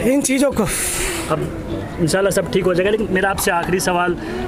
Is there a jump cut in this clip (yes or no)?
no